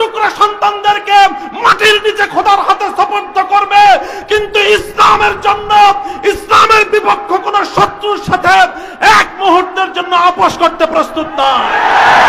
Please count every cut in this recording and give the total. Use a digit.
0